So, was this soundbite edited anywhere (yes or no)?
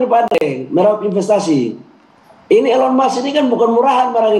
no